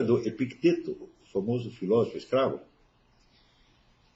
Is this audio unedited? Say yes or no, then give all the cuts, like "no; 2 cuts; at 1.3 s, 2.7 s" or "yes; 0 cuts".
yes; 0 cuts